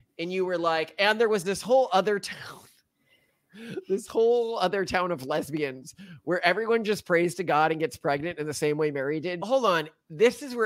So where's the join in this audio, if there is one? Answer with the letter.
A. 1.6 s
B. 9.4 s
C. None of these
B